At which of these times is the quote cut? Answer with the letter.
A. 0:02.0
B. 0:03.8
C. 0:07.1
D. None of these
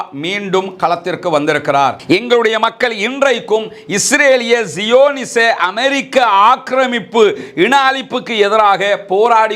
A